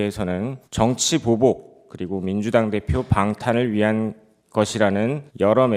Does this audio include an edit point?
no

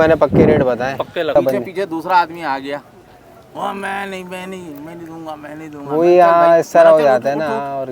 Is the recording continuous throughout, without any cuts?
no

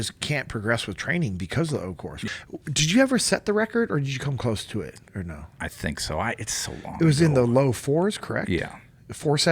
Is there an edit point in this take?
yes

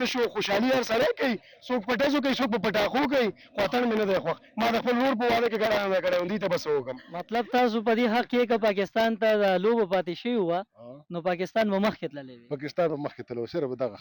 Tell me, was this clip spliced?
yes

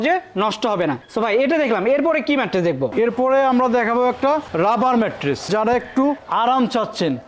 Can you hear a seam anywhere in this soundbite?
no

